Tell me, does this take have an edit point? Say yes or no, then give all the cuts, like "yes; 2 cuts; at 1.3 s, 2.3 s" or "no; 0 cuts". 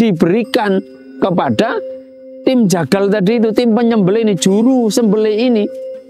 no; 0 cuts